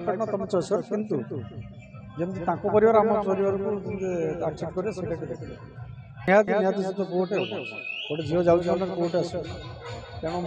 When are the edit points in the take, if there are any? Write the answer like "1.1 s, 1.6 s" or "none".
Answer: 6.3 s